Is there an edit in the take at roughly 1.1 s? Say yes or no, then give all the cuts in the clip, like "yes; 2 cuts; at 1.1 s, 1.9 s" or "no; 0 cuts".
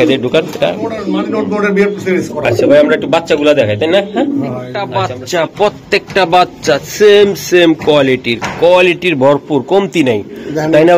yes; 2 cuts; at 1.1 s, 4.9 s